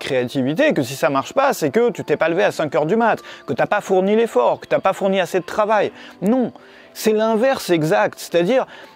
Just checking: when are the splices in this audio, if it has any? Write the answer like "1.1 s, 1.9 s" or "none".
none